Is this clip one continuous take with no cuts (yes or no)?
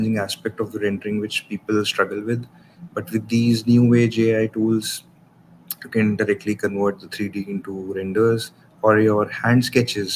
yes